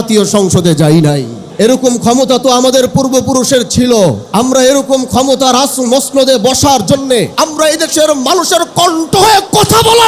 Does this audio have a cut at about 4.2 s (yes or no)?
yes